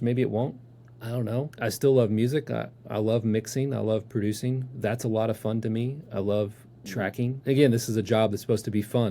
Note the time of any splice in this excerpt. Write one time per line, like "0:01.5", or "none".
0:01.5
0:07.4

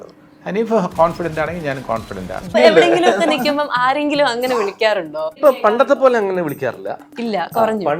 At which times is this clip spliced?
0:02.5
0:05.4

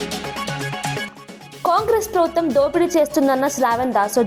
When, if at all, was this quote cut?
0:01.0

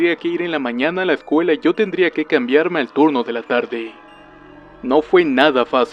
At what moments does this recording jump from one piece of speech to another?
none

